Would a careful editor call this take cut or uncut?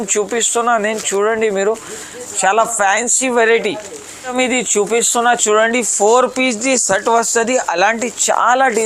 cut